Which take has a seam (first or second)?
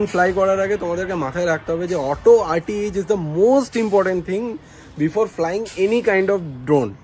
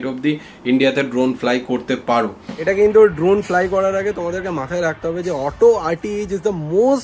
second